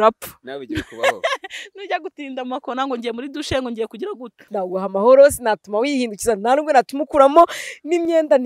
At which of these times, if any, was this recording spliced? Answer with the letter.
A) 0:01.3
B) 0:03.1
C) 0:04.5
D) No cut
C